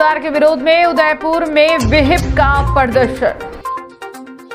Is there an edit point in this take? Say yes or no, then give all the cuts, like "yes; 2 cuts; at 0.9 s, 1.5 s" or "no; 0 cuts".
no; 0 cuts